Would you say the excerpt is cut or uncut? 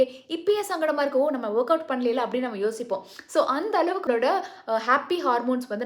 cut